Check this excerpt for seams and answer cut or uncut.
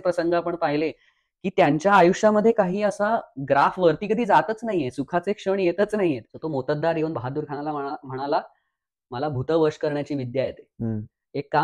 cut